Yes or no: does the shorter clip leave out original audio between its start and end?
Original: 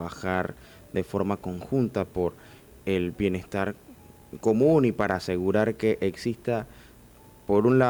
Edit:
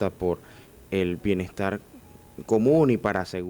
no